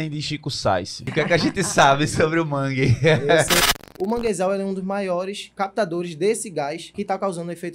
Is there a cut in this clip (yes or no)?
yes